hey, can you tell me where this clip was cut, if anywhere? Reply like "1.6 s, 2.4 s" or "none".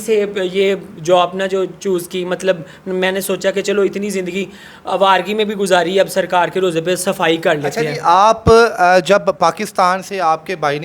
none